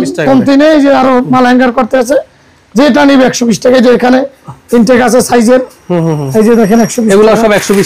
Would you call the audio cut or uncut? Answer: uncut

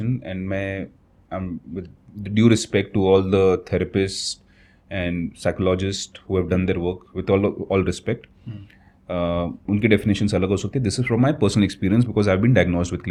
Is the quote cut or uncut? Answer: uncut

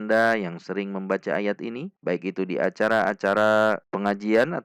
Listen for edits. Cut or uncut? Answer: uncut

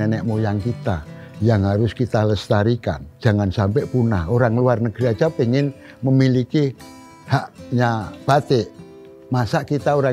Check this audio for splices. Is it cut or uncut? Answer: cut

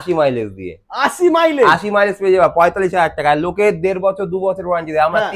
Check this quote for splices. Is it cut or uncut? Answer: uncut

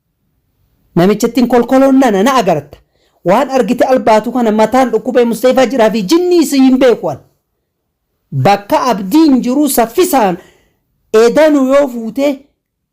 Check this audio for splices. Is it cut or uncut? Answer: uncut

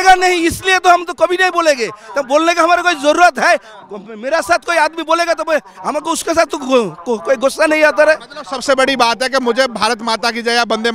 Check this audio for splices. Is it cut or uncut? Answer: uncut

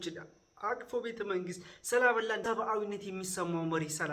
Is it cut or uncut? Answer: cut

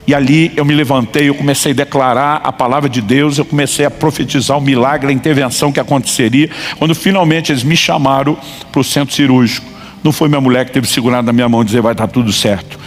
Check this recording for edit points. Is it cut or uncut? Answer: uncut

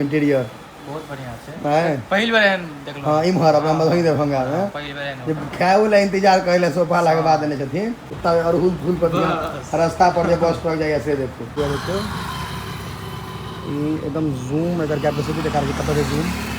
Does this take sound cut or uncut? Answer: cut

